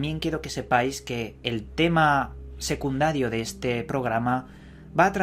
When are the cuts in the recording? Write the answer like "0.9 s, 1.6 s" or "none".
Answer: 3.1 s